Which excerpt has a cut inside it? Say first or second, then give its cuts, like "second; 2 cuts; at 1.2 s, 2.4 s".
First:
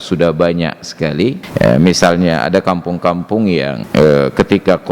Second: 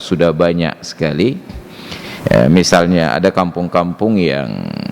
first; 2 cuts; at 1.4 s, 3.8 s